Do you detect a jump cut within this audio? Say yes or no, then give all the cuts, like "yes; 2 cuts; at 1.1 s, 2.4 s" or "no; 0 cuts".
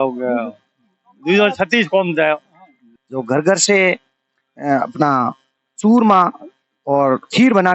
yes; 1 cut; at 2.8 s